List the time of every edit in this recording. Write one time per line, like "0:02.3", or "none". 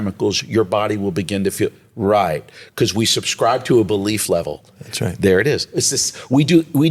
none